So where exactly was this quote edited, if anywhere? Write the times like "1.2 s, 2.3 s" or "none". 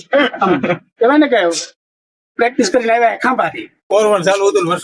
3.8 s